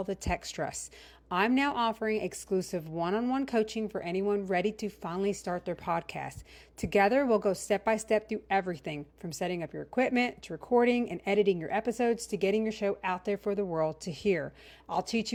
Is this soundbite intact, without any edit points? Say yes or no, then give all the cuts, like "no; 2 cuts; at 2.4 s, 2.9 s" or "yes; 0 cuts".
yes; 0 cuts